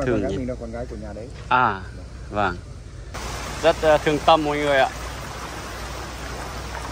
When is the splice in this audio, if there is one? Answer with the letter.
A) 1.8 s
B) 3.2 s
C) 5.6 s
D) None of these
B